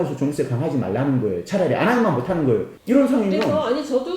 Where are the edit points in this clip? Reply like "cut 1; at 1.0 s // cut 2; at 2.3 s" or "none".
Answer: cut 1; at 2.7 s